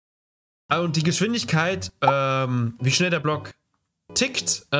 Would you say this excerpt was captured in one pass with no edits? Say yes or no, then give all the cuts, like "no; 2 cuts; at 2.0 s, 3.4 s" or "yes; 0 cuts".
yes; 0 cuts